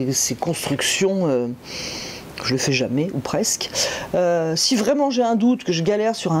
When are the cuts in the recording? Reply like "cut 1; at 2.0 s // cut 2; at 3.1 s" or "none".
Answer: none